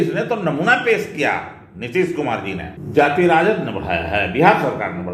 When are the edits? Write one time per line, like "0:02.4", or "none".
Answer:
0:02.8